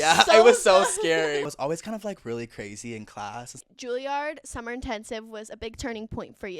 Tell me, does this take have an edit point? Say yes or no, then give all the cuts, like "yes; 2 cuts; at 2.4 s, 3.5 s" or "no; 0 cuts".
yes; 2 cuts; at 1.5 s, 3.5 s